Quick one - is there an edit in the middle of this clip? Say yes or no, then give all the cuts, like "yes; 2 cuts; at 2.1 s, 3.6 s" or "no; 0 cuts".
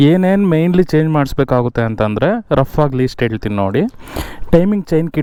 no; 0 cuts